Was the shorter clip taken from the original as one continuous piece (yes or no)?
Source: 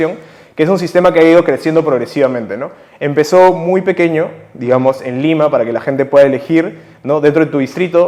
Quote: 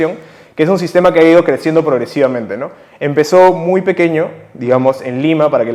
yes